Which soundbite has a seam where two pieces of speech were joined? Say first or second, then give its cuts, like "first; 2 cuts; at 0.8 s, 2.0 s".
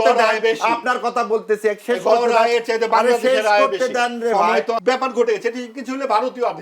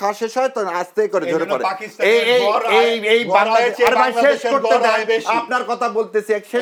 first; 1 cut; at 4.8 s